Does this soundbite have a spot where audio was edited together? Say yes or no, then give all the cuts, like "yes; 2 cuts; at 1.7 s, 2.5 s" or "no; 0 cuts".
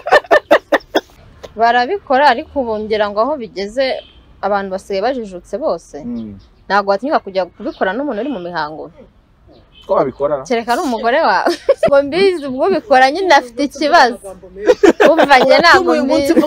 yes; 2 cuts; at 1.1 s, 11.9 s